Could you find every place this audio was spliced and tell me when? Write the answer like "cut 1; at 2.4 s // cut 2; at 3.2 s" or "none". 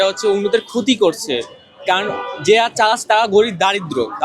none